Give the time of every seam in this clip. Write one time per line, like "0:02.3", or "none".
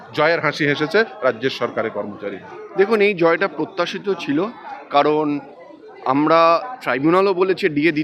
none